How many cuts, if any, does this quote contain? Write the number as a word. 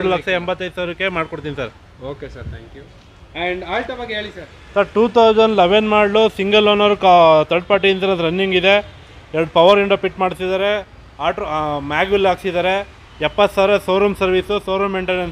zero